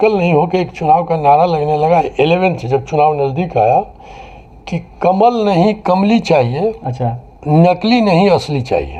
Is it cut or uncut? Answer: uncut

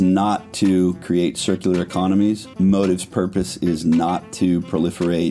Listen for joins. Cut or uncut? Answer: uncut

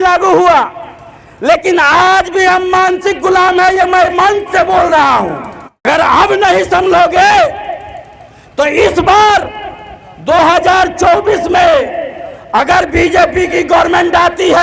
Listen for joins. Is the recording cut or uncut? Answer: cut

